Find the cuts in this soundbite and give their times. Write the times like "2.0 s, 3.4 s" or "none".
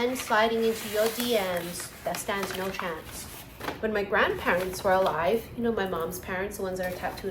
none